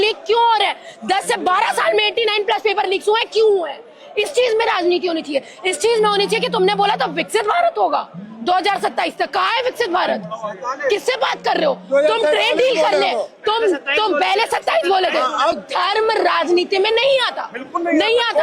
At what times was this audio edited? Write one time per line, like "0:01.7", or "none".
0:15.6